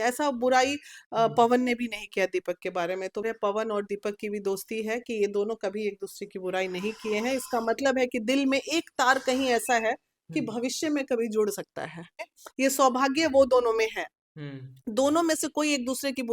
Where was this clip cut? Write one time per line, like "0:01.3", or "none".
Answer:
0:03.2
0:12.4

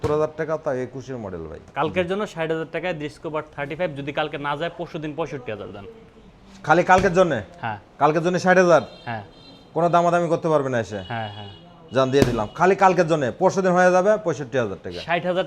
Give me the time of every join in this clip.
0:01.7

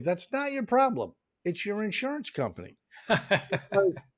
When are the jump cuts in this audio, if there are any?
none

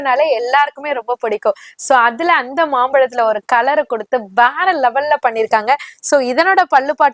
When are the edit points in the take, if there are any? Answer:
none

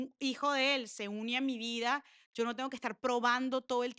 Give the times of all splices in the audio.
none

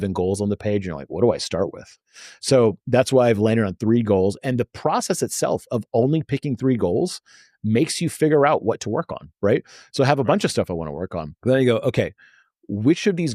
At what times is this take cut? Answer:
none

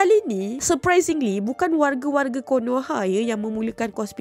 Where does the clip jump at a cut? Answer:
none

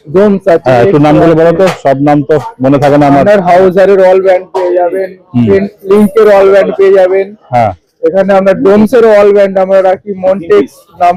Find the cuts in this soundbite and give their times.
none

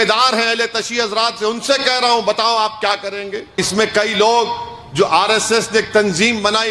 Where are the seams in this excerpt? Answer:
0:03.6

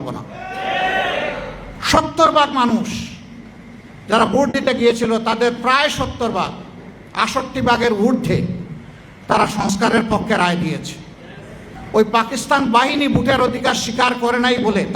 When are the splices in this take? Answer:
0:01.7
0:11.7

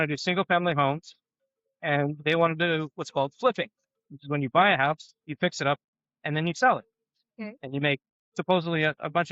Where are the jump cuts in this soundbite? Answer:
none

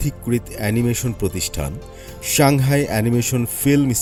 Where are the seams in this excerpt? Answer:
none

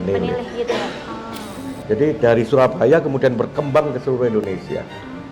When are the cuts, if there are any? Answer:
0:01.5

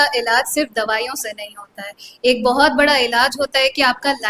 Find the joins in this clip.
none

